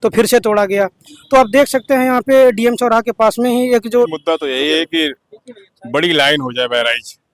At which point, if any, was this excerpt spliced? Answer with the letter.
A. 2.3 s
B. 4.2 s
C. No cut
B